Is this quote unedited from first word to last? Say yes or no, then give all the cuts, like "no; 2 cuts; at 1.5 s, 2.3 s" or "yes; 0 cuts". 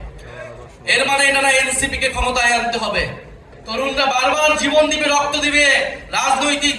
no; 1 cut; at 3.6 s